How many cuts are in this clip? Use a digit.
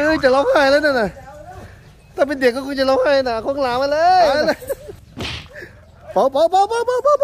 1